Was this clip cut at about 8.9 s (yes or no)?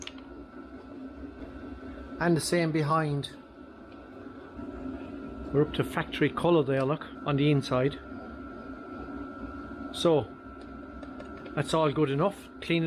no